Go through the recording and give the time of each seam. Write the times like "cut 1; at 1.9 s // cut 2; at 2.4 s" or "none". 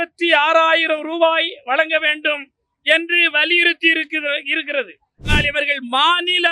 cut 1; at 5.3 s